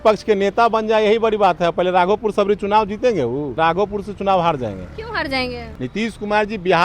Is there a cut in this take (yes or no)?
yes